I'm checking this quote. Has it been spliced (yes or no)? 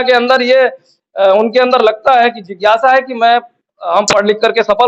no